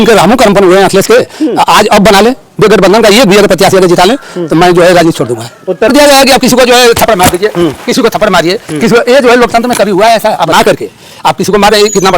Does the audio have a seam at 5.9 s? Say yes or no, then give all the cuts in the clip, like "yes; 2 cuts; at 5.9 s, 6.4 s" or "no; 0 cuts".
yes; 2 cuts; at 5.9 s, 10.5 s